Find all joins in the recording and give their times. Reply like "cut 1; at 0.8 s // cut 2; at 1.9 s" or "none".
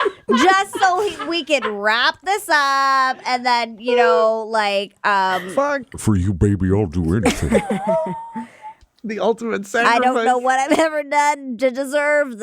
cut 1; at 6.0 s // cut 2; at 9.8 s

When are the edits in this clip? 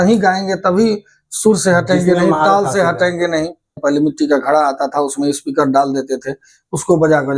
cut 1; at 3.8 s

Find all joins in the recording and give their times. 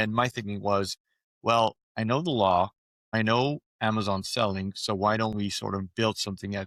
none

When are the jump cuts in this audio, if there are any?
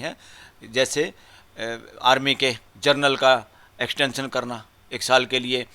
cut 1; at 2.7 s

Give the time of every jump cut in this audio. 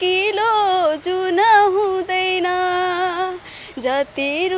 none

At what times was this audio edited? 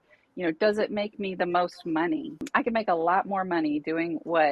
cut 1; at 2.4 s

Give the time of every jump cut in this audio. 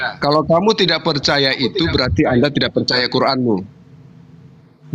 none

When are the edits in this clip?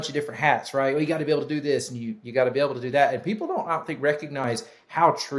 cut 1; at 4.4 s

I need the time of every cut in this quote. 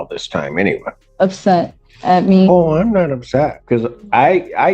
cut 1; at 1.0 s // cut 2; at 3.6 s

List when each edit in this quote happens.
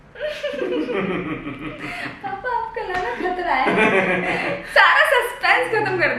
none

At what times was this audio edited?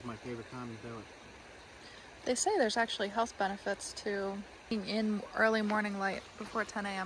cut 1; at 4.7 s

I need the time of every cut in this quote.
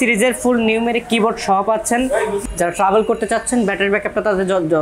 cut 1; at 2.4 s

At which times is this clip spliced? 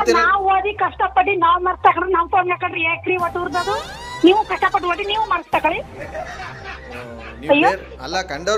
cut 1; at 5.9 s

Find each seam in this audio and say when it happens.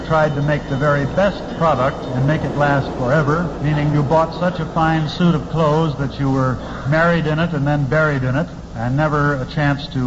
none

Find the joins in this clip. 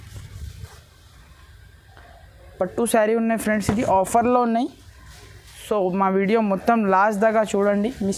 none

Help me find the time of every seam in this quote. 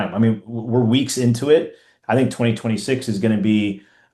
none

